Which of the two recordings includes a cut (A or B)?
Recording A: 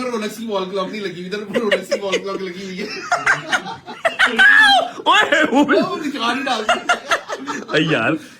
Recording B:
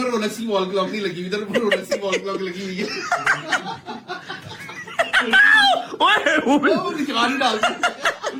A